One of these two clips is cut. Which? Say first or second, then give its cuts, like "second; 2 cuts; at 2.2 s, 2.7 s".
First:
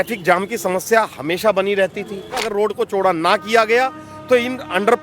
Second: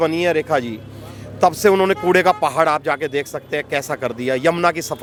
first; 1 cut; at 2.4 s